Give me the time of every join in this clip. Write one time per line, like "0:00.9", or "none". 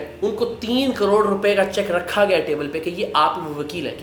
none